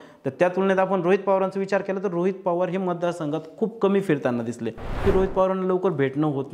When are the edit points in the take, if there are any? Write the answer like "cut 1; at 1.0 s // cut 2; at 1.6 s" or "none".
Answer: cut 1; at 5.0 s